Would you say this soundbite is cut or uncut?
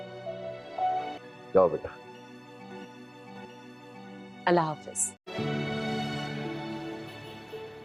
uncut